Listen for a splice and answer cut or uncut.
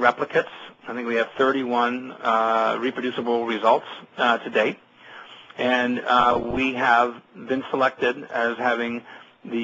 cut